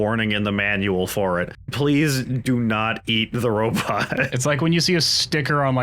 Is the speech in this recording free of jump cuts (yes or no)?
no